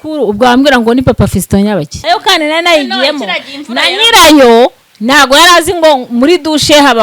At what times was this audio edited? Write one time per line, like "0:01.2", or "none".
0:01.9